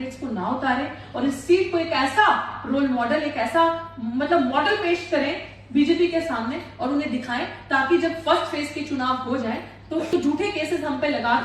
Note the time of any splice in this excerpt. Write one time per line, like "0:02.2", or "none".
0:10.1